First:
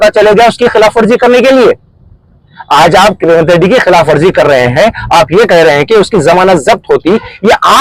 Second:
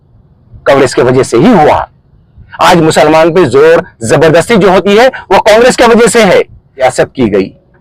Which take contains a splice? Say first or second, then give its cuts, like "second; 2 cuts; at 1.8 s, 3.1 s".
second; 1 cut; at 6.7 s